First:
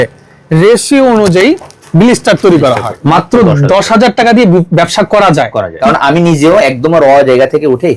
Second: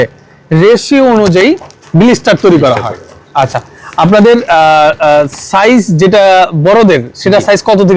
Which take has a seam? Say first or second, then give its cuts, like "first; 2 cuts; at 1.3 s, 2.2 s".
first; 2 cuts; at 2.9 s, 5.7 s